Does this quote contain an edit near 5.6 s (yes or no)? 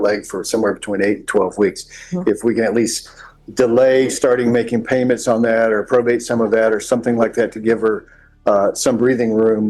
yes